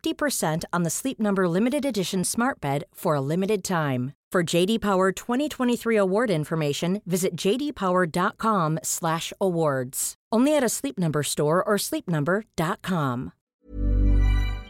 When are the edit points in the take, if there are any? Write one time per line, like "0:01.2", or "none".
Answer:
0:13.6